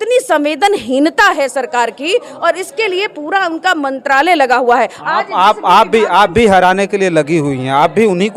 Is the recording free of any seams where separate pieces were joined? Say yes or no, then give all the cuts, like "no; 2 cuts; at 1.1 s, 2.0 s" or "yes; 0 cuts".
yes; 0 cuts